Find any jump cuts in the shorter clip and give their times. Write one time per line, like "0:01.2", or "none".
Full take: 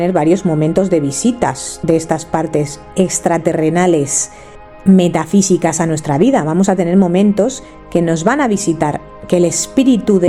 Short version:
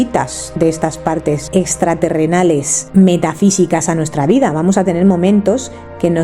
0:01.4
0:02.8

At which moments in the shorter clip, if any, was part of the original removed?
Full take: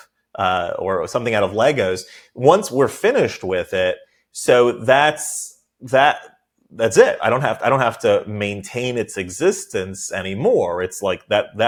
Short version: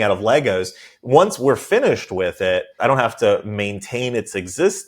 0:02.7

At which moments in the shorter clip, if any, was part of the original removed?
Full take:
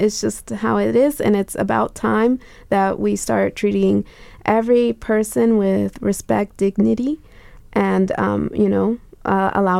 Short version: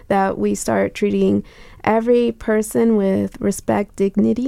none

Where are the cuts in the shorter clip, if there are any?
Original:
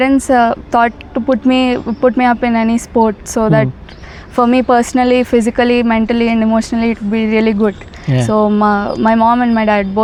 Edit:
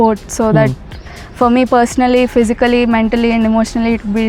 none

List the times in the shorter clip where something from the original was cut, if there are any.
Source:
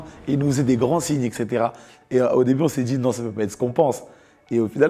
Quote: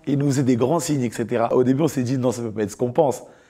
0:01.5

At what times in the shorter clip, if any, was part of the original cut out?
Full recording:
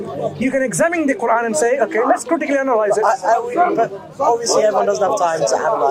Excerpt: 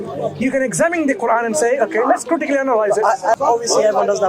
0:03.4

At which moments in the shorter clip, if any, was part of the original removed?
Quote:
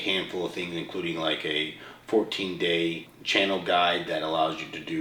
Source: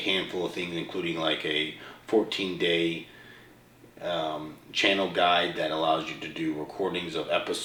0:03.1

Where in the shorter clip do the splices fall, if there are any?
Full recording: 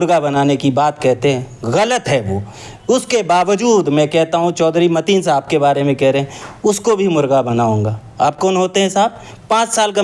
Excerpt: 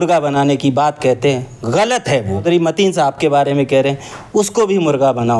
0:02.4

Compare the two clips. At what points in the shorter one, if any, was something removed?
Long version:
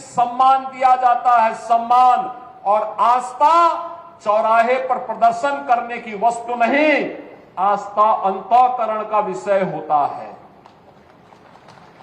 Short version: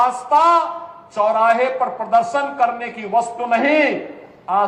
none

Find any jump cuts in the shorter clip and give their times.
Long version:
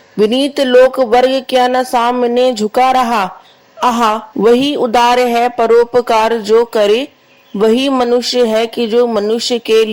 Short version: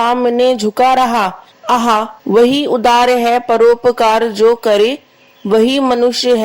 0:01.9

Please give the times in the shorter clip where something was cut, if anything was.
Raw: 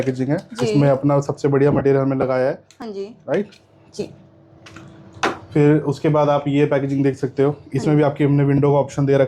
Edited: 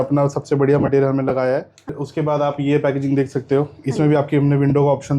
0:02.0

